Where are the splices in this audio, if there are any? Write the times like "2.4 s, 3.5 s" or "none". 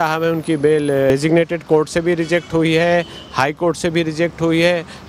1.1 s